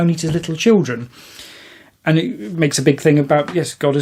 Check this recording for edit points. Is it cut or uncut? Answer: uncut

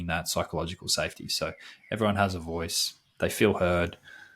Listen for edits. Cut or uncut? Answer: uncut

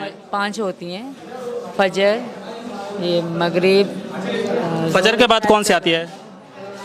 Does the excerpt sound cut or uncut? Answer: uncut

